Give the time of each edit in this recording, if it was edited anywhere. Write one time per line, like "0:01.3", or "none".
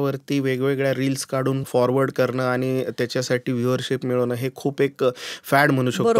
0:01.6